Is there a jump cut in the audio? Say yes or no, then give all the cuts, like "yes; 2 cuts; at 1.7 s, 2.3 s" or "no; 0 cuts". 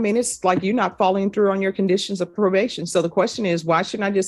no; 0 cuts